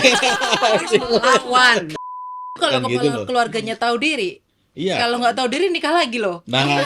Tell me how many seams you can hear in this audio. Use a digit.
1